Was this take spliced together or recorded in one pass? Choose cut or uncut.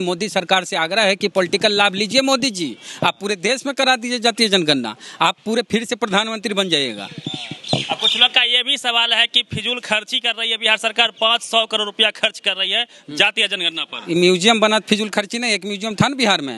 uncut